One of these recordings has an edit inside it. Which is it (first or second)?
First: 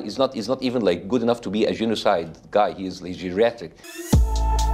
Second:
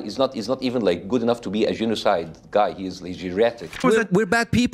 second